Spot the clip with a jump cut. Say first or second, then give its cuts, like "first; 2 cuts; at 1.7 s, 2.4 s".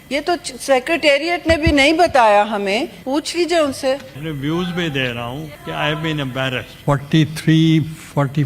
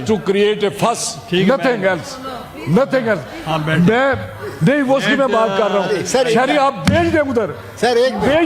first; 4 cuts; at 3.0 s, 4.2 s, 5.5 s, 6.7 s